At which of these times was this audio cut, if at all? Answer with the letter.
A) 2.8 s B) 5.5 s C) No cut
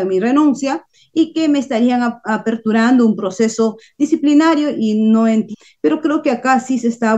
B